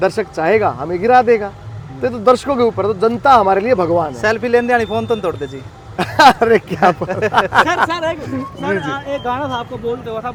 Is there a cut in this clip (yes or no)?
no